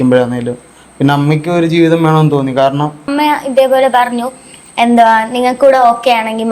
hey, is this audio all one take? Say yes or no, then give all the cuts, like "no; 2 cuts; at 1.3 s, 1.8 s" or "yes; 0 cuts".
no; 1 cut; at 3.1 s